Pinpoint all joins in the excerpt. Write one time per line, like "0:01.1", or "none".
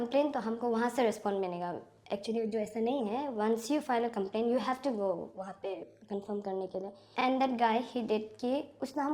0:07.1